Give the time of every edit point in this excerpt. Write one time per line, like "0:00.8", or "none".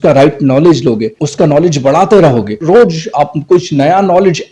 0:01.2
0:02.6

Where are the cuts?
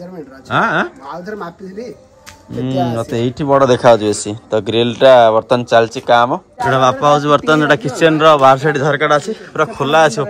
0:06.5

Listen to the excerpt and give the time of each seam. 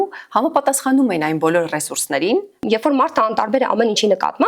0:02.6

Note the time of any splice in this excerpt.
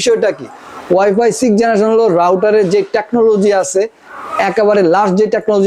none

